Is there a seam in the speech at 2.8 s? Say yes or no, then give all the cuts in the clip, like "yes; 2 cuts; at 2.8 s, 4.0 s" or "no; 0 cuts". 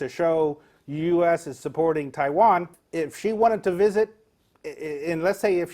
yes; 1 cut; at 2.8 s